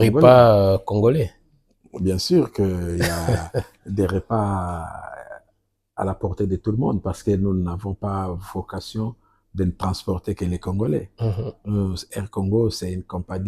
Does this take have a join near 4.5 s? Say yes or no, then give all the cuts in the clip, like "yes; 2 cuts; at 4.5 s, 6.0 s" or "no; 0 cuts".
no; 1 cut; at 11.5 s